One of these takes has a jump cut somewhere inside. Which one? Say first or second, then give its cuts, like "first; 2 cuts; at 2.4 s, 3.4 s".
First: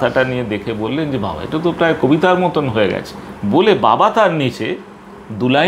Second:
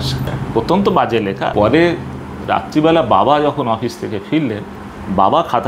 second; 1 cut; at 1.5 s